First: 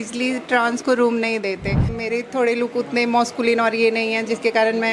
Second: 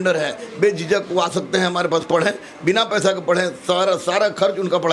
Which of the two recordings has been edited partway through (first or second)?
first